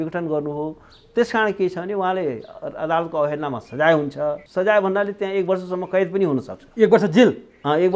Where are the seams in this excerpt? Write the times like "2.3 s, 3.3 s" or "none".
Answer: 4.4 s